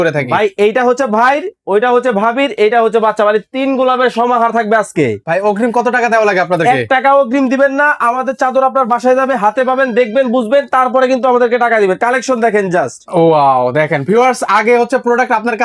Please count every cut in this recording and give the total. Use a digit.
1